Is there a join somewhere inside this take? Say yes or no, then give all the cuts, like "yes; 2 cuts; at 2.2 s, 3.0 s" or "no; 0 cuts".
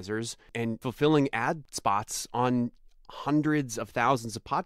yes; 2 cuts; at 0.8 s, 1.7 s